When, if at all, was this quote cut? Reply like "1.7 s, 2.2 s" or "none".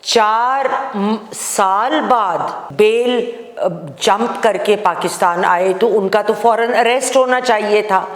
2.6 s